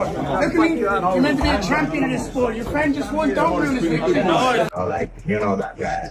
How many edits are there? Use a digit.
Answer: 1